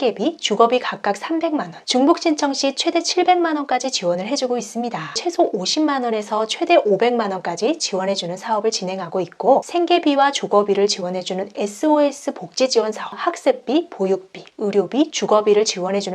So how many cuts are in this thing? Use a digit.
3